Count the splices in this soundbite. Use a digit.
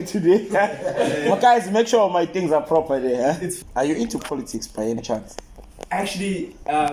1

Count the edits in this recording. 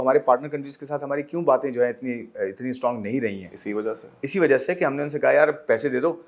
0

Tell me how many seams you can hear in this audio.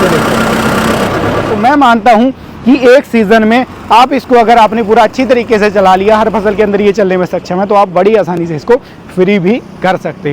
1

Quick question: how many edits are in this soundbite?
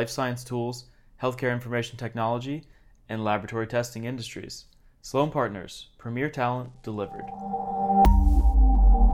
1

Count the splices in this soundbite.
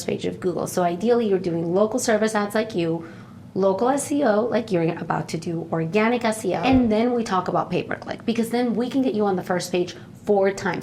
1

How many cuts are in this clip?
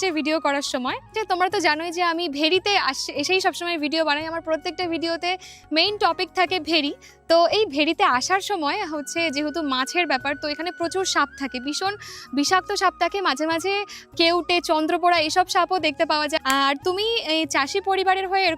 2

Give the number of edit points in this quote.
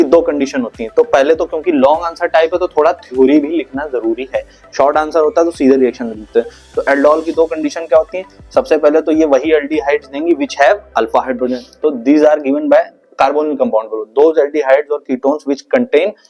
0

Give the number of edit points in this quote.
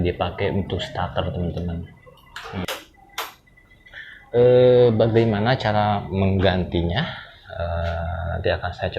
1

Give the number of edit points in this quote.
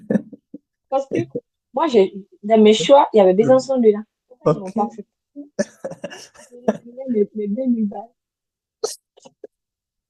0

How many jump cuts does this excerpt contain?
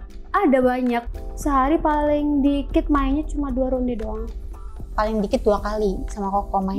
1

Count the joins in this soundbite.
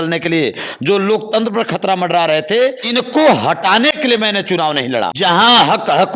2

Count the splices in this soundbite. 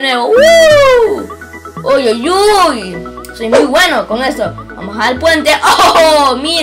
0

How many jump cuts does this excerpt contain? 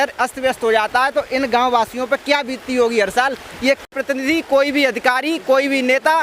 1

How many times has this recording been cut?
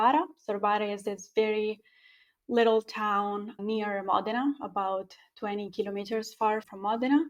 0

